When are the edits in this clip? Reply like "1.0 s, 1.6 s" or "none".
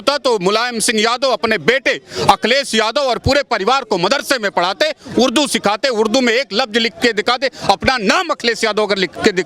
none